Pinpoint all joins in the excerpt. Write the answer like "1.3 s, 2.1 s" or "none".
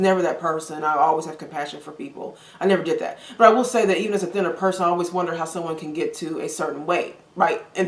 none